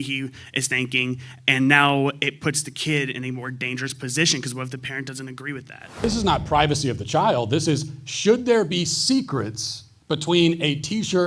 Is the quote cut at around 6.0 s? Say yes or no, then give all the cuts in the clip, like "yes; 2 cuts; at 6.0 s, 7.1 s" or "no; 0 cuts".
yes; 1 cut; at 6.0 s